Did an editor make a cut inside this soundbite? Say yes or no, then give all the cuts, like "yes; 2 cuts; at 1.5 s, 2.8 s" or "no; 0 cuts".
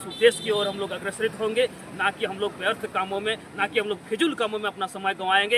no; 0 cuts